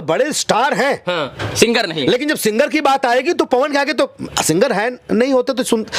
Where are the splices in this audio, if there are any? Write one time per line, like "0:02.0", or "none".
none